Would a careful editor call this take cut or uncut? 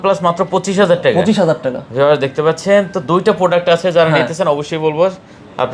uncut